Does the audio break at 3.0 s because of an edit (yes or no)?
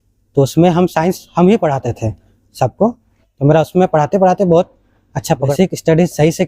no